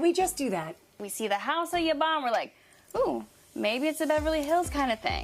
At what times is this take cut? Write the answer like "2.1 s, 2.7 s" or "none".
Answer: 1.0 s